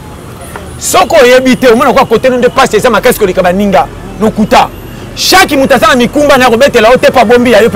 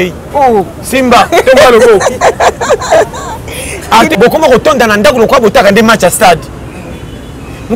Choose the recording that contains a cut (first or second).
second